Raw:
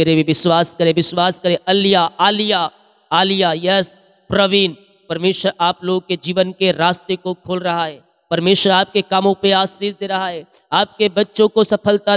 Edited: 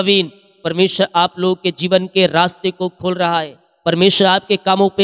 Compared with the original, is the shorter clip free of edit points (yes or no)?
yes